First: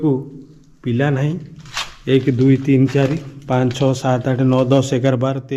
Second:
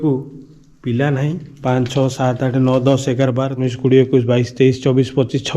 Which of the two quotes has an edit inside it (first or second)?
second